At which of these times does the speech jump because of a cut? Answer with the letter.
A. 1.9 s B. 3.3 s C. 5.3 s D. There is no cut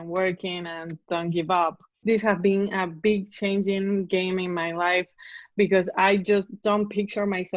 A